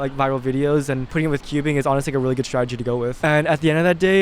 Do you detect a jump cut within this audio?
yes; 2 cuts; at 1.1 s, 3.1 s

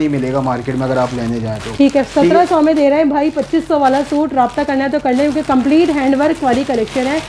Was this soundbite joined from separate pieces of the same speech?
no; 0 cuts

